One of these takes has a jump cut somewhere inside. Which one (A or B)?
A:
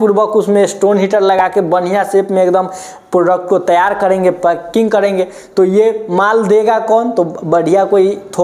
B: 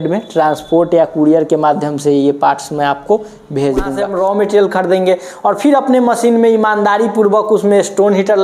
B